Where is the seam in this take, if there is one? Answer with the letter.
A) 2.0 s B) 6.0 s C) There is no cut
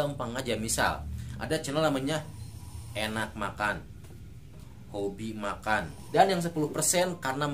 B